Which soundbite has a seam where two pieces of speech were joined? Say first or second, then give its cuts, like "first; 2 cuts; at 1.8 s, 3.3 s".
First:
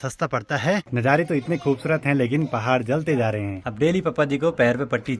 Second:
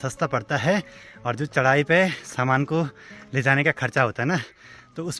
first; 2 cuts; at 0.9 s, 3.6 s